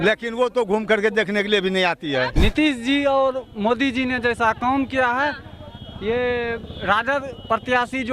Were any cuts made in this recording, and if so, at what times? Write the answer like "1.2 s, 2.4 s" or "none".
2.4 s